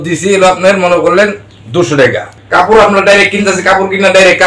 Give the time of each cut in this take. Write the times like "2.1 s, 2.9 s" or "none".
2.3 s